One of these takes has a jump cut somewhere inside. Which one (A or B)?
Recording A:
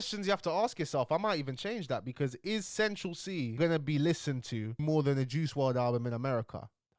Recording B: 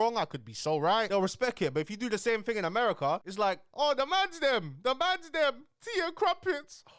B